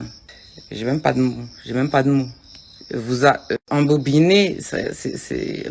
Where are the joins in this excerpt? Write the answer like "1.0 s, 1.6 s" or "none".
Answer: none